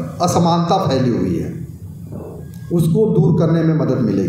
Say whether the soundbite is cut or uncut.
uncut